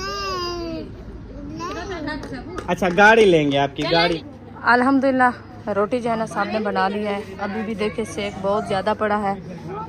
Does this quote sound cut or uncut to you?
cut